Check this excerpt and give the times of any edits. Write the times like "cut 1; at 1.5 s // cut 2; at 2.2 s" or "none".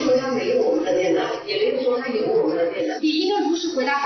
cut 1; at 2.9 s